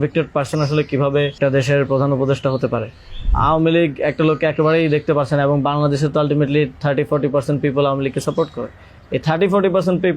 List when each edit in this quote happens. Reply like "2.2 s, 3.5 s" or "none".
1.4 s, 3.3 s